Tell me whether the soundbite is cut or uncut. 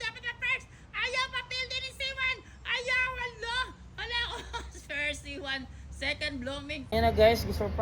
cut